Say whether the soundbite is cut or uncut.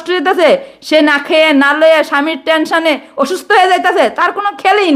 uncut